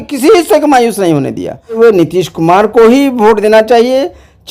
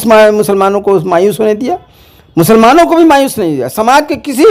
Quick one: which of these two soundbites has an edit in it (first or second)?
first